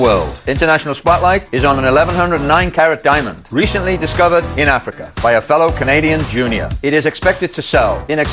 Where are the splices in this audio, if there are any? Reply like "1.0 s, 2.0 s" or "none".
none